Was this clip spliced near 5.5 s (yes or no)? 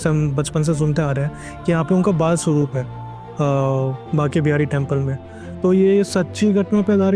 no